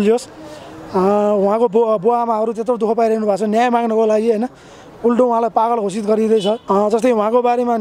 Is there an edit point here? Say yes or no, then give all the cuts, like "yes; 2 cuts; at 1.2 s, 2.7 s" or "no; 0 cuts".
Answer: yes; 1 cut; at 6.6 s